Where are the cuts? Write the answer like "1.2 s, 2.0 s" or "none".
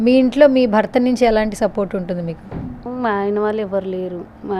none